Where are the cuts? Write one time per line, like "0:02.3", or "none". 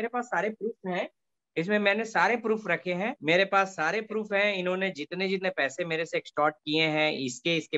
0:03.2